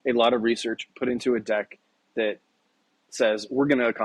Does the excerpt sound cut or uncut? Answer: uncut